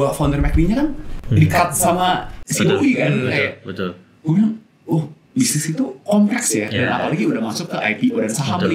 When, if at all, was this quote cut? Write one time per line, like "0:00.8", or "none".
none